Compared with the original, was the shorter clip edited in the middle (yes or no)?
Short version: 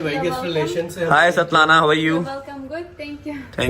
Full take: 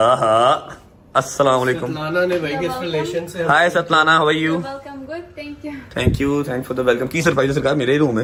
no